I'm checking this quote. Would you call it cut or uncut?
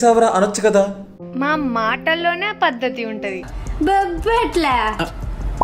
cut